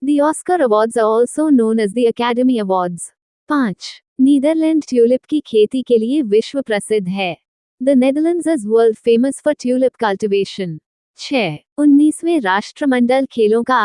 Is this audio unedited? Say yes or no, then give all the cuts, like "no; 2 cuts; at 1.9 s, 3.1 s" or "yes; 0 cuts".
no; 2 cuts; at 3.5 s, 11.3 s